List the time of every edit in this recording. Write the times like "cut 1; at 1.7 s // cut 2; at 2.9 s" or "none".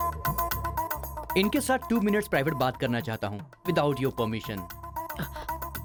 none